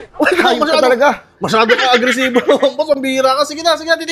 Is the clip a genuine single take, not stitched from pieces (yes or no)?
yes